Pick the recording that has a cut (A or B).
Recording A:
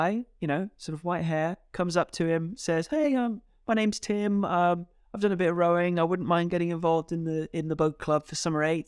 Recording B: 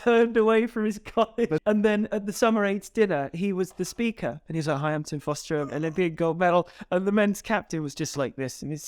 B